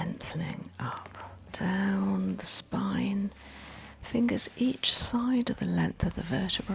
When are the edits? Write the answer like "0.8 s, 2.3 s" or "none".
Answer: 1.5 s